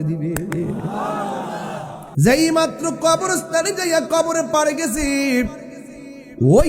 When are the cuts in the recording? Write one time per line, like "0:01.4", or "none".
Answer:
0:02.0